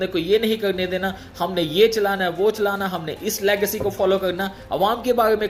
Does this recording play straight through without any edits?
yes; 0 cuts

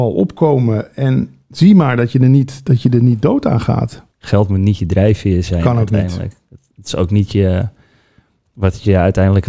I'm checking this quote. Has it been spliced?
yes; 1 cut; at 4.0 s

